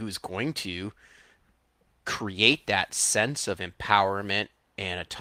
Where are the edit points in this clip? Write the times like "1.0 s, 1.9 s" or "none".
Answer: none